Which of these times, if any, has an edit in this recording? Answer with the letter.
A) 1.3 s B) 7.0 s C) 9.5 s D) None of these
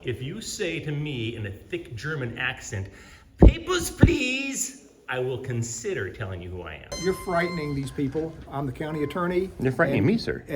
B